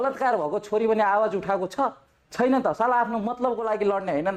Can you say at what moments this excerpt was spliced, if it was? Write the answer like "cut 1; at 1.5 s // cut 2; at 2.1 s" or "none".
none